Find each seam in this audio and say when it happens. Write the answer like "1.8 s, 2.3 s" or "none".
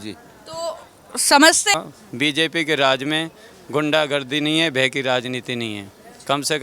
1.7 s